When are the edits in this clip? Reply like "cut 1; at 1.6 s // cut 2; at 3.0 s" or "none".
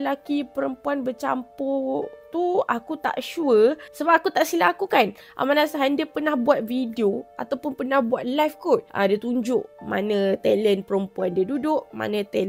none